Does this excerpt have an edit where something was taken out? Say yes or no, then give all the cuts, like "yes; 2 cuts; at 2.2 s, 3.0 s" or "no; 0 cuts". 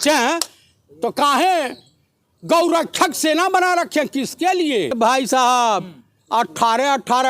yes; 1 cut; at 4.9 s